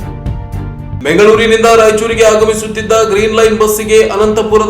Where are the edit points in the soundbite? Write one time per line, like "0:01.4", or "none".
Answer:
0:01.0